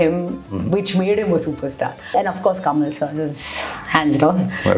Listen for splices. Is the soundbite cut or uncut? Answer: cut